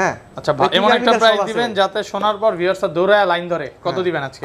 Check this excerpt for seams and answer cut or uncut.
uncut